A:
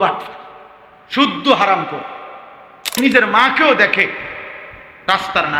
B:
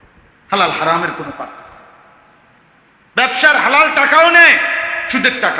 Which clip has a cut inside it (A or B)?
A